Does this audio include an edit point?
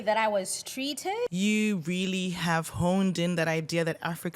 yes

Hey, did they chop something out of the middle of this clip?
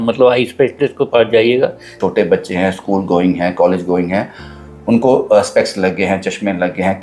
yes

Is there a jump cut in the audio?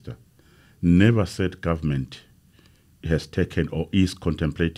no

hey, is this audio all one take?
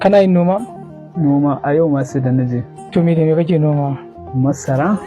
yes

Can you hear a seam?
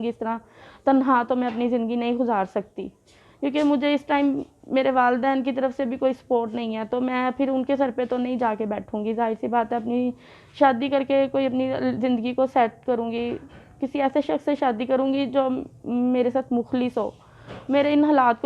no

